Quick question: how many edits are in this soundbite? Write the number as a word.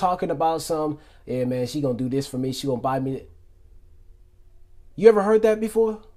zero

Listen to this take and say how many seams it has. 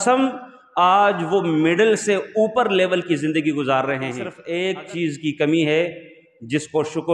one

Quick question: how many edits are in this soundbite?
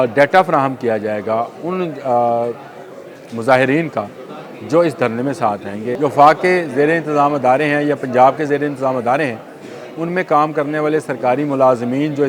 one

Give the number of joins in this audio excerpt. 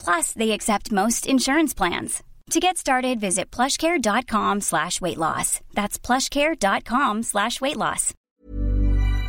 one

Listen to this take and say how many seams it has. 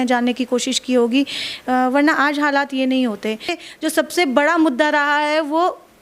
one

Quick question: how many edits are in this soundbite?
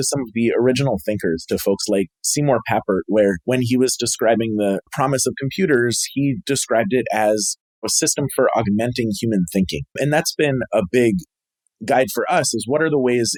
zero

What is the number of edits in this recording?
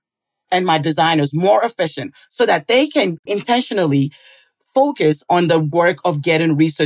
one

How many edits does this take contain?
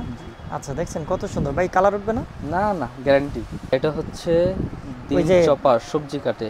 one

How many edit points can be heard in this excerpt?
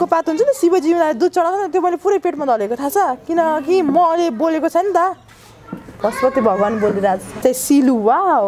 one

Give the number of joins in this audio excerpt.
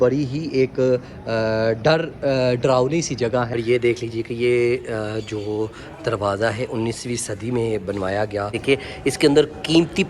two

